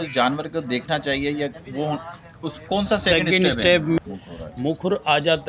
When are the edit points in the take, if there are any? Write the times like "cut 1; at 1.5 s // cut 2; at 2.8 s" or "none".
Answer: cut 1; at 4.0 s